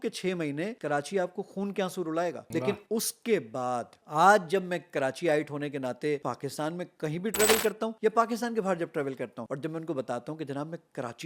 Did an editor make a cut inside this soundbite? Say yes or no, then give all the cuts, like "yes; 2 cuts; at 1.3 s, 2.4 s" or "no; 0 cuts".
yes; 5 cuts; at 0.8 s, 2.4 s, 6.2 s, 7.9 s, 9.4 s